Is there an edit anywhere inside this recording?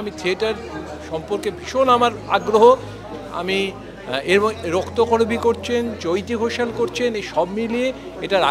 no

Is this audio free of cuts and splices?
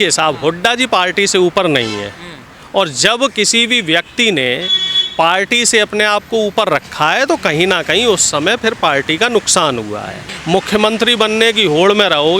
no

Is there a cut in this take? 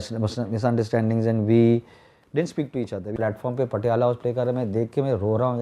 yes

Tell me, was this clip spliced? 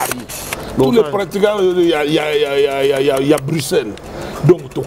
no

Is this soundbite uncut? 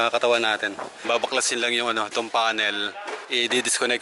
no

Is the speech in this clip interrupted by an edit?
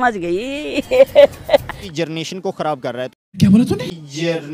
yes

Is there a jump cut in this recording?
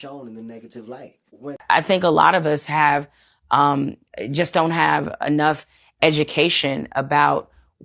yes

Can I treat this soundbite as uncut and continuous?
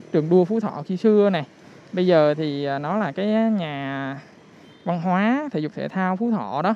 yes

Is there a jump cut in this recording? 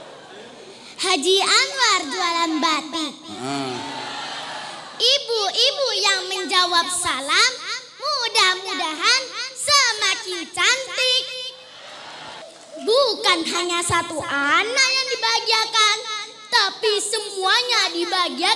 yes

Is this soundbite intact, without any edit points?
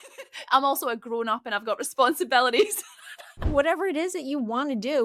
no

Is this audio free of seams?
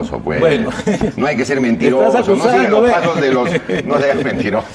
yes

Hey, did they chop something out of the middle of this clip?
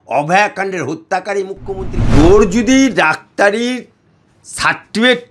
yes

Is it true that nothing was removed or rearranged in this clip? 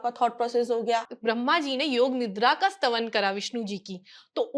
no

